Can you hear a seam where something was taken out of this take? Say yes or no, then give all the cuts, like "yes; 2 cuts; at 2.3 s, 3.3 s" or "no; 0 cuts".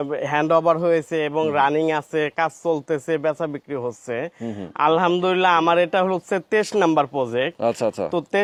no; 0 cuts